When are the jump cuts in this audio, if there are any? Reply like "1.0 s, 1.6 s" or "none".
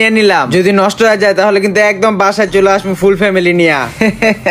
none